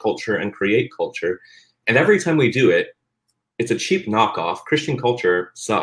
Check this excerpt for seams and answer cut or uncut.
uncut